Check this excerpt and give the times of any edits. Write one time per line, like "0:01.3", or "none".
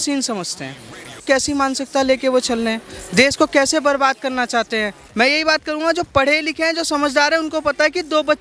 0:01.2
0:05.0